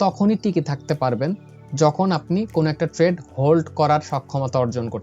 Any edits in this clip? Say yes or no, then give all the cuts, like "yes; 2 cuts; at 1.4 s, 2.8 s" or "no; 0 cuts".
no; 0 cuts